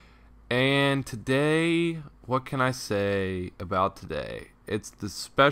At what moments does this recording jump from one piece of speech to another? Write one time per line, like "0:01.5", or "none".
0:02.2